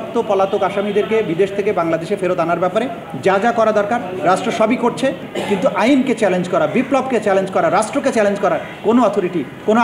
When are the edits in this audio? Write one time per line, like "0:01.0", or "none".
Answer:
0:05.3